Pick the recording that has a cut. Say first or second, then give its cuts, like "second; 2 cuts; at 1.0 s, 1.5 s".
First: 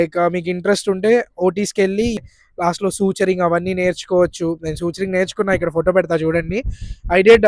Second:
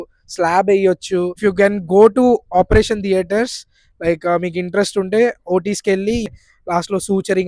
second; 1 cut; at 1.3 s